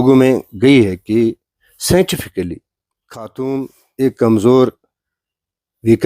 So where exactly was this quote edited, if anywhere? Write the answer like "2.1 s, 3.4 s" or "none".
3.3 s